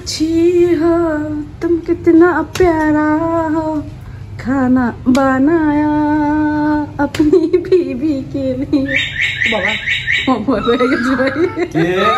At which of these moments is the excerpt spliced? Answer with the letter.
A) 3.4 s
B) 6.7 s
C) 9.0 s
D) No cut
D